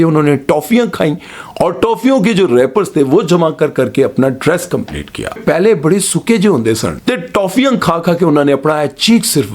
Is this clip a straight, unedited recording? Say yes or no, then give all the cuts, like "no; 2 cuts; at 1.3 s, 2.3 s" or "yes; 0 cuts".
no; 2 cuts; at 5.4 s, 6.9 s